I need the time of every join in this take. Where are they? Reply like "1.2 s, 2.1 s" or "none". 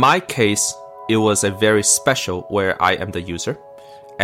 none